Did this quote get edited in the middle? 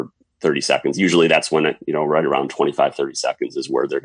no; 0 cuts

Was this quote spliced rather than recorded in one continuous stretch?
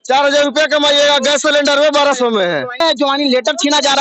yes; 1 cut; at 2.8 s

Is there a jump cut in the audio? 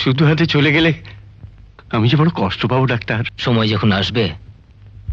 yes; 1 cut; at 3.3 s

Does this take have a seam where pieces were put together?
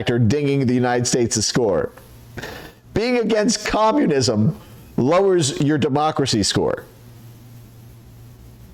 no; 0 cuts

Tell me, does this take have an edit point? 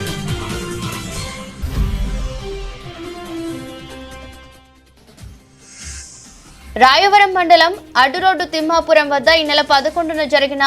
yes; 2 cuts; at 1.6 s, 6.7 s

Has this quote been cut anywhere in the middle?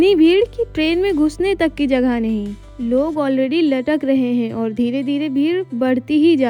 no; 0 cuts

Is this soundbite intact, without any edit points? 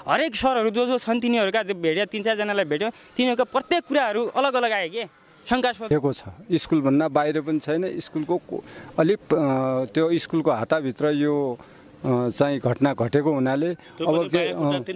no; 1 cut; at 5.9 s

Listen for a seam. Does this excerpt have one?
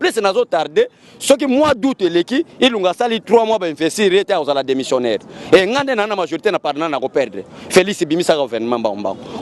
no; 0 cuts

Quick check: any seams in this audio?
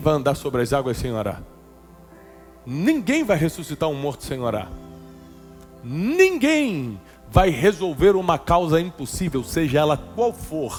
no; 0 cuts

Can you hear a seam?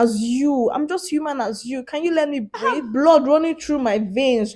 yes; 1 cut; at 2.8 s

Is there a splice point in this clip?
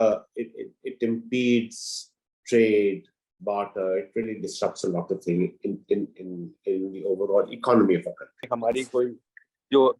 yes; 1 cut; at 8.4 s

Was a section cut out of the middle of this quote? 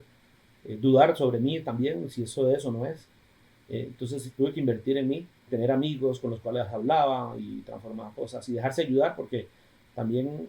yes; 1 cut; at 5.5 s

